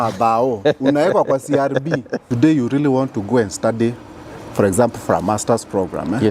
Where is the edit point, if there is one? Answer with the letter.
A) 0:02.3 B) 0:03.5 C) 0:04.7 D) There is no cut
A